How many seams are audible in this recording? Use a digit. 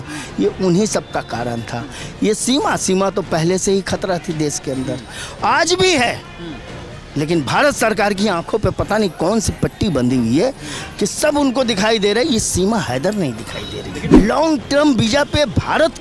1